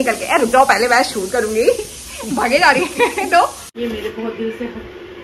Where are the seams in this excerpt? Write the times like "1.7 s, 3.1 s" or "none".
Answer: 3.6 s